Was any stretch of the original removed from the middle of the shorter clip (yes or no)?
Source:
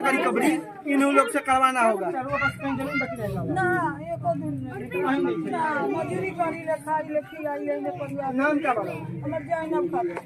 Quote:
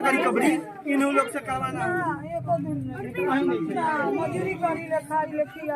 yes